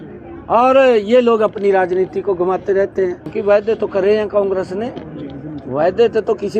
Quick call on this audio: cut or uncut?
cut